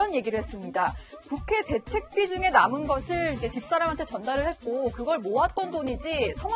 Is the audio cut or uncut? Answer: uncut